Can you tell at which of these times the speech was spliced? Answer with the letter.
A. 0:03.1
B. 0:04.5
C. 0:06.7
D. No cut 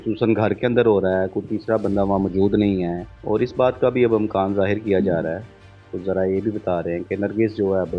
A